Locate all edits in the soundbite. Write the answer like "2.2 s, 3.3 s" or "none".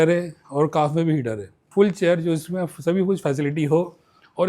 1.7 s